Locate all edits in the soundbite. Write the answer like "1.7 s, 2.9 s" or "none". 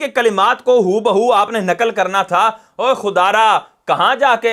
none